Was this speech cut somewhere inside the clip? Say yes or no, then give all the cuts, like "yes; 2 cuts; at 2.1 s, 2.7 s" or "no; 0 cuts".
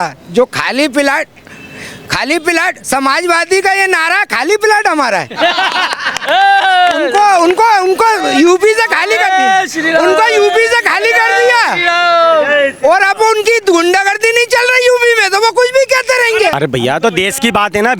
yes; 1 cut; at 16.5 s